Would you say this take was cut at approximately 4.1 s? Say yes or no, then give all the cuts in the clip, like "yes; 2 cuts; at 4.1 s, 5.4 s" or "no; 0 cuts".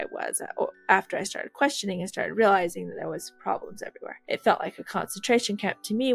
yes; 1 cut; at 4.1 s